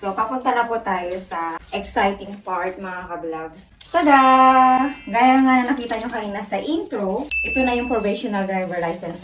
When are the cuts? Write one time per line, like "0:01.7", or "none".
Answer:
none